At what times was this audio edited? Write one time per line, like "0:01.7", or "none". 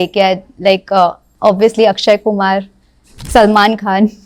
0:01.3